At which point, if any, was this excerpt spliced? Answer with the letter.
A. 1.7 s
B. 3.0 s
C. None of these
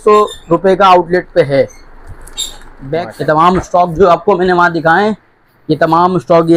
B